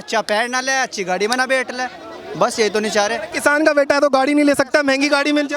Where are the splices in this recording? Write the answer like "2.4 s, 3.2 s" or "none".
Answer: none

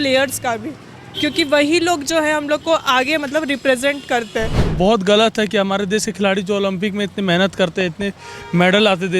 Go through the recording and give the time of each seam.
4.6 s

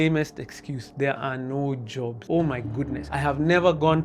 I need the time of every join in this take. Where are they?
2.2 s, 3.0 s

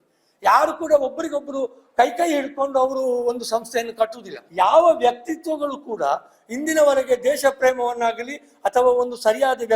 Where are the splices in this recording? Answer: 4.4 s

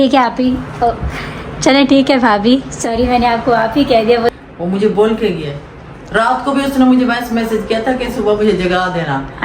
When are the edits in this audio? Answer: 4.3 s

